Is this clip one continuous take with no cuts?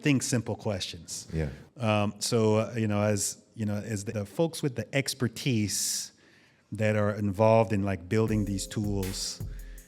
no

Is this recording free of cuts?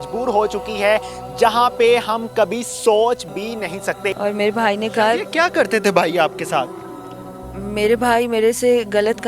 no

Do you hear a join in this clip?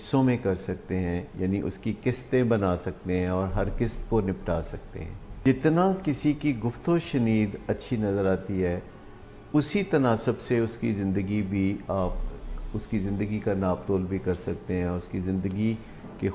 yes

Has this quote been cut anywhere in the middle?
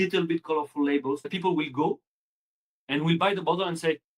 yes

